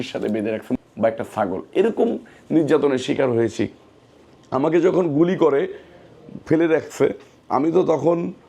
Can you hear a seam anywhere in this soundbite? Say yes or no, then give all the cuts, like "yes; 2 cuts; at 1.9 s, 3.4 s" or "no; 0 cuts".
no; 0 cuts